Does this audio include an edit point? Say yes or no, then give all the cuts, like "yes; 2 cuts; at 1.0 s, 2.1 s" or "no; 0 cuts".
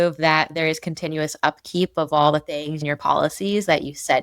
yes; 1 cut; at 2.8 s